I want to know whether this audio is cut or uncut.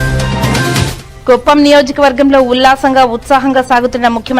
cut